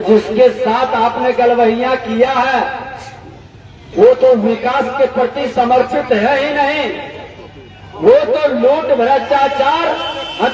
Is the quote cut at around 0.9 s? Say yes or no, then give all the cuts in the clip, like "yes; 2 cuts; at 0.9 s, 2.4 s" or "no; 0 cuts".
no; 0 cuts